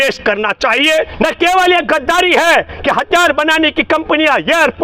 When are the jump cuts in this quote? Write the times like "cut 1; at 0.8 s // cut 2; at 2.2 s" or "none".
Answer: cut 1; at 1.1 s